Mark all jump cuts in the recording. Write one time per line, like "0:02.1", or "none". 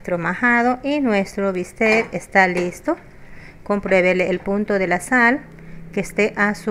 none

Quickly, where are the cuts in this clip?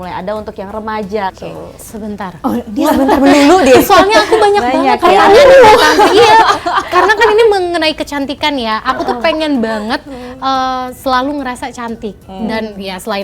0:01.4

